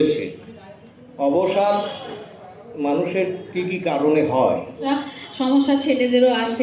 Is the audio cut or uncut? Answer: cut